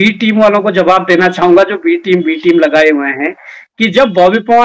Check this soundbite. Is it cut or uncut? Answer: uncut